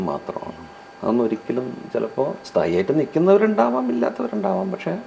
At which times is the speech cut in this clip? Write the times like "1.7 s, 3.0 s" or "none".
none